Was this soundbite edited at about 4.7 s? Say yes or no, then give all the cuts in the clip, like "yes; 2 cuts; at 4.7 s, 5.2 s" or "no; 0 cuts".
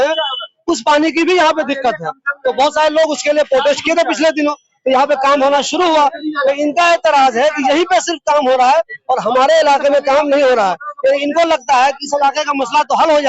no; 0 cuts